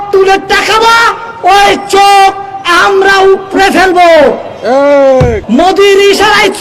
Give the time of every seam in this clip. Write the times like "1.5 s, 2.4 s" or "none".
5.4 s